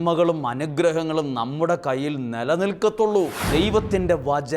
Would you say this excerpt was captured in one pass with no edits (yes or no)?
no